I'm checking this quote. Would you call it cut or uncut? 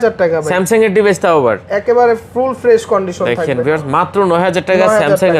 uncut